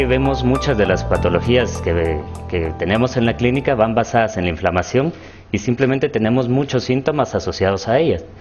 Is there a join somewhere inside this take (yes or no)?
no